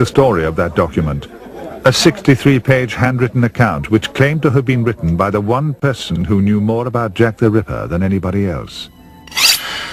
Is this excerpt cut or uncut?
uncut